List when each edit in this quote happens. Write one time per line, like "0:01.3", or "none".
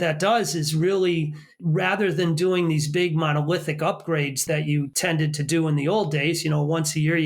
0:01.5
0:04.8